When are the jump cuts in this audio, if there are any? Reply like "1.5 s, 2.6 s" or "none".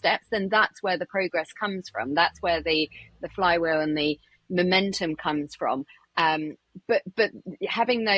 none